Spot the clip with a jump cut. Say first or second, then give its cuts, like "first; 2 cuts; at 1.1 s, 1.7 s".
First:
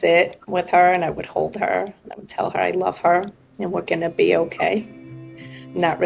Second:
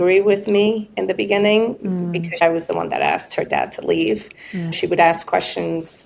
second; 2 cuts; at 2.4 s, 4.8 s